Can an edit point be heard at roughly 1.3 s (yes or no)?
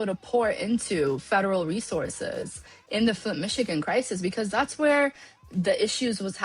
no